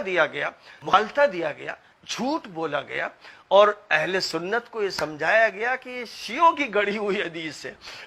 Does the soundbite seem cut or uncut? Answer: cut